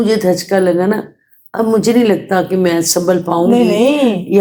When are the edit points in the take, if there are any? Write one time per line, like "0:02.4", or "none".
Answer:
none